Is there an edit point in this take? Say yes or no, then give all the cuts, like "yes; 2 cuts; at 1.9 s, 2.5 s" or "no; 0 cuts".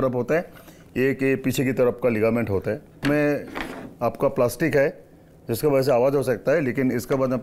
yes; 1 cut; at 3.0 s